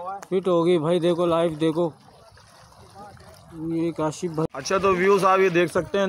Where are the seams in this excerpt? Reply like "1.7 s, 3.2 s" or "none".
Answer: 4.5 s